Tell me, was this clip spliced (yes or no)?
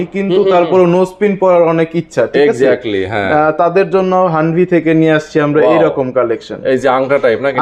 no